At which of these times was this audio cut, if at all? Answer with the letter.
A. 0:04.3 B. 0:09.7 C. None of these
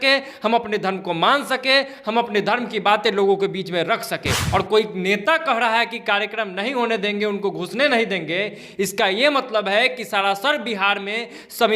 A